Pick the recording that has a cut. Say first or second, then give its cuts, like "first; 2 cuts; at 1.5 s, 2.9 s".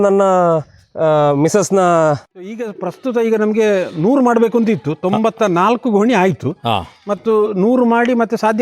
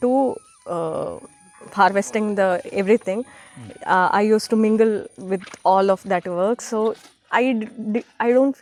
first; 1 cut; at 2.3 s